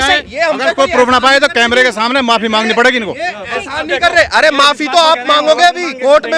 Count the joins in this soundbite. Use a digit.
0